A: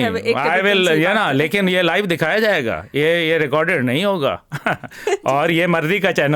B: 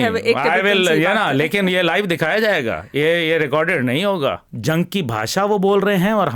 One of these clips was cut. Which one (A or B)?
B